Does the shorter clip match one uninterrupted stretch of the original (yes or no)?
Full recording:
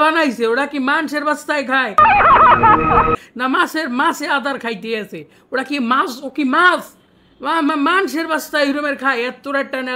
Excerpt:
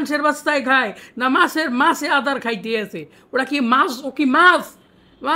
no